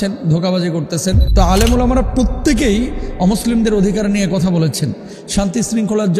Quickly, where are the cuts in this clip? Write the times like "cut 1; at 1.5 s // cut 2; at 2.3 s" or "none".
cut 1; at 1.4 s